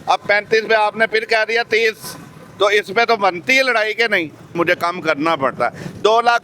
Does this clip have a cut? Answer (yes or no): yes